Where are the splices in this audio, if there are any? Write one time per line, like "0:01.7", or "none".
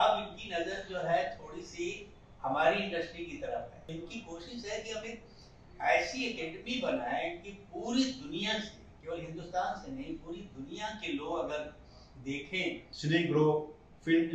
0:03.9
0:12.9